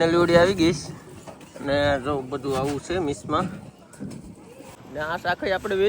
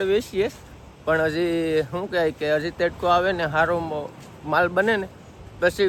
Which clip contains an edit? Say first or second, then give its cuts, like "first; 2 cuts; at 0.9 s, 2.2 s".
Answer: first; 1 cut; at 4.8 s